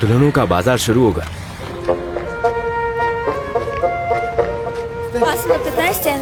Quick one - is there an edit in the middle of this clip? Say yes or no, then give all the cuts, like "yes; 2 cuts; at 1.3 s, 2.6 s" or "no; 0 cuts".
no; 0 cuts